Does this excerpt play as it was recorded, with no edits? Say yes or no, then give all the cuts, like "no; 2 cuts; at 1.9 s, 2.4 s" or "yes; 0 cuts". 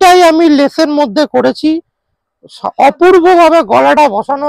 yes; 0 cuts